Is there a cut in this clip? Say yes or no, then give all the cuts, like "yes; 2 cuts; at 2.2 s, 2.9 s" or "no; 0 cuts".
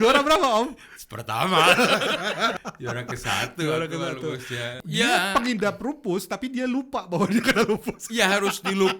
yes; 2 cuts; at 2.6 s, 4.7 s